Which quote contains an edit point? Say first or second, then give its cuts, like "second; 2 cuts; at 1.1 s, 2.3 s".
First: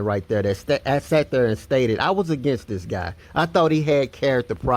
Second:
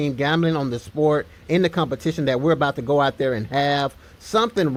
first; 1 cut; at 2.4 s